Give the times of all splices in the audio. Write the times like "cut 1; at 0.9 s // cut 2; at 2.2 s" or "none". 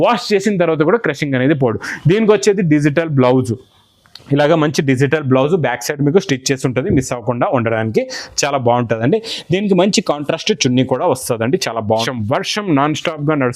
cut 1; at 12.1 s